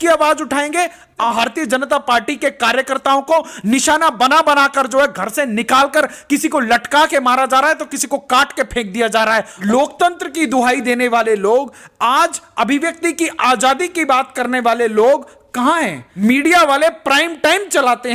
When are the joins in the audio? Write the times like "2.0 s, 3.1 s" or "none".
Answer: 1.3 s, 9.5 s, 16.0 s